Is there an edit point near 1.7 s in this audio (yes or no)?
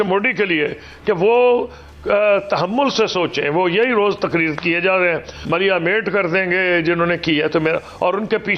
no